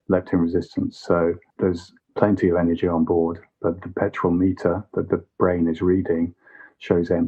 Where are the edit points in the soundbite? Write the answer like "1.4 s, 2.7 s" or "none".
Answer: 1.5 s